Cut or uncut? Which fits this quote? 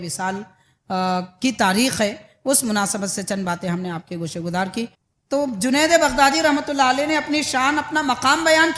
cut